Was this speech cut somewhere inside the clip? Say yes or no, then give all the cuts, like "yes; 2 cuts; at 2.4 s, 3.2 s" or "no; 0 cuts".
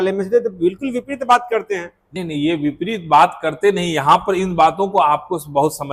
no; 0 cuts